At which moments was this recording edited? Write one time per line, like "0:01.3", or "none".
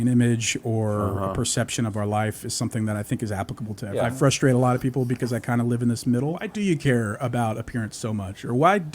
0:03.8
0:06.5